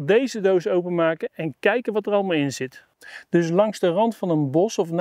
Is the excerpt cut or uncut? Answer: cut